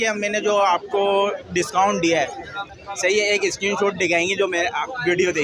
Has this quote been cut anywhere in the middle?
yes; 1 cut; at 2.7 s

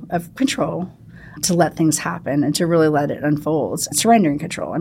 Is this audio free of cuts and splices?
no; 2 cuts; at 1.4 s, 3.9 s

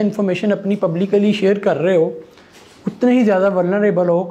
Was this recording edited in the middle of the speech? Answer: no; 0 cuts

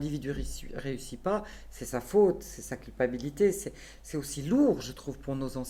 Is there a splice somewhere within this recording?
no; 0 cuts

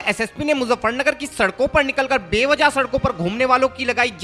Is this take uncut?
yes; 0 cuts

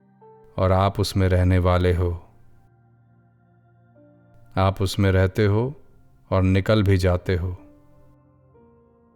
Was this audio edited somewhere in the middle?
yes; 2 cuts; at 2.6 s, 4.5 s

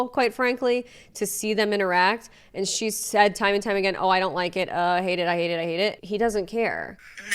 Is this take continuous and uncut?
yes; 0 cuts

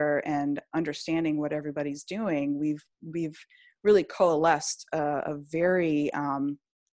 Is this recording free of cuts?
yes; 0 cuts

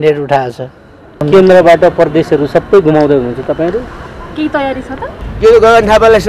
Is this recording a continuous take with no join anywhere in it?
no; 2 cuts; at 1.2 s, 5.2 s

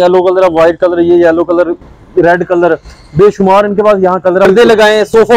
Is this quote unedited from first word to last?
no; 1 cut; at 4.5 s

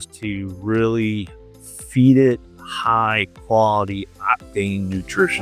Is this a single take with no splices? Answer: yes; 0 cuts

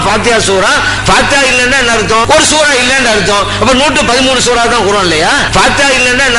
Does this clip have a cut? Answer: yes; 3 cuts; at 1.0 s, 2.2 s, 5.5 s

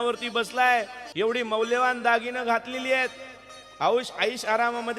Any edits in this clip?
yes; 1 cut; at 1.0 s

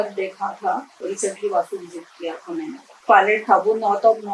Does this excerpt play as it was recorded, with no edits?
no; 2 cuts; at 0.9 s, 2.9 s

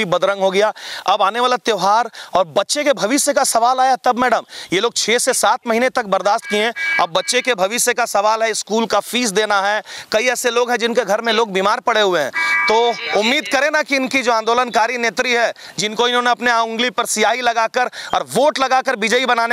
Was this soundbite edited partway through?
no; 0 cuts

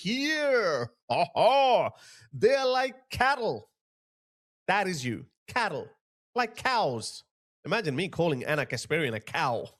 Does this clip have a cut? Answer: no; 0 cuts

